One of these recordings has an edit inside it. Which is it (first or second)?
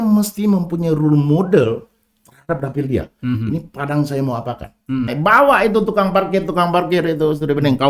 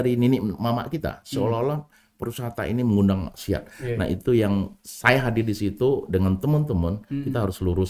first